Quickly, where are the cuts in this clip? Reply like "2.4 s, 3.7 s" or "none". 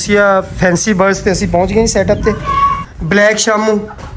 2.8 s